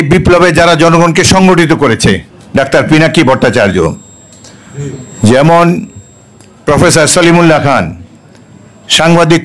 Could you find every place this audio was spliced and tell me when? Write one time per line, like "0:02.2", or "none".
0:02.3